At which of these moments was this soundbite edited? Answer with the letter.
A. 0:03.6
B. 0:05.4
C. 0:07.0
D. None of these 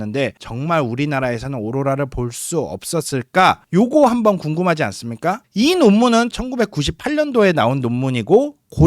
B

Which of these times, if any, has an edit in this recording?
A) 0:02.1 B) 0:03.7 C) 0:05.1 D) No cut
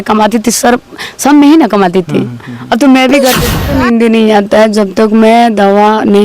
B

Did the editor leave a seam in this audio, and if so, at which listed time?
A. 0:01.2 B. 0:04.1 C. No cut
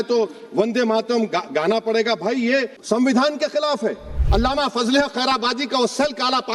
B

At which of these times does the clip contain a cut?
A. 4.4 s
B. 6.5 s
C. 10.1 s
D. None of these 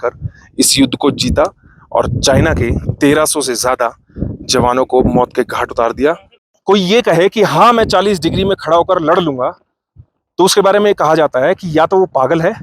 B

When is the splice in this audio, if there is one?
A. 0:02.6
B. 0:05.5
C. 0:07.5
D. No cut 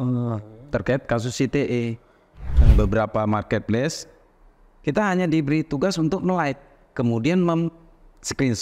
A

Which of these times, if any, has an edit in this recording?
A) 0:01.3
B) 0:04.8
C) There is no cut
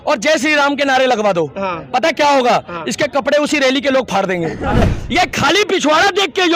B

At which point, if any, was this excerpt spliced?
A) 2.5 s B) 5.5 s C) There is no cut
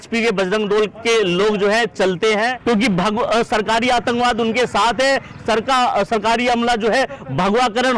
A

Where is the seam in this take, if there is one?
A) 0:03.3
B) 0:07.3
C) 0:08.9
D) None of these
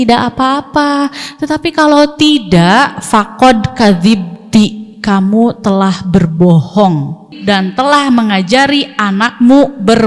B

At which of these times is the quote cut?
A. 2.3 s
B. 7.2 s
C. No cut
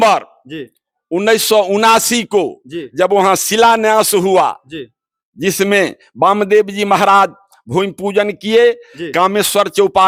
C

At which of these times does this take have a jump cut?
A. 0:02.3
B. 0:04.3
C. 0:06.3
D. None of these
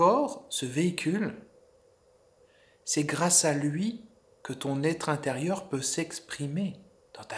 D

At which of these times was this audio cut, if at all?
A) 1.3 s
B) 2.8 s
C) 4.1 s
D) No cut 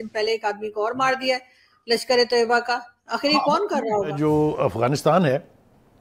C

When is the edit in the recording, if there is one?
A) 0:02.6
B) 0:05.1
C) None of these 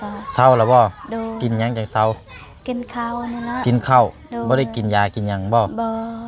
C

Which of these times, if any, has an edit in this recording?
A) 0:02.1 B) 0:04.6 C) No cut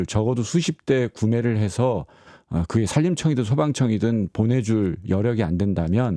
C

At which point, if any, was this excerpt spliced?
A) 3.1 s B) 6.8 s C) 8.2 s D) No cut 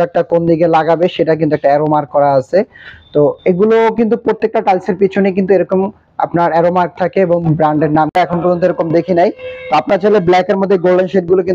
C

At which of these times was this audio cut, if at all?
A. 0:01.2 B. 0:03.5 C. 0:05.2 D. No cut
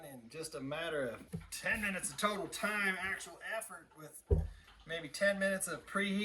A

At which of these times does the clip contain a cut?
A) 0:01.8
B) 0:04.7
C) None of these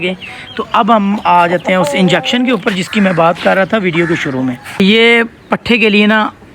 B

